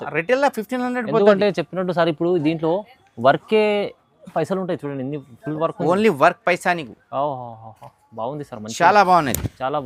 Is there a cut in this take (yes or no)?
no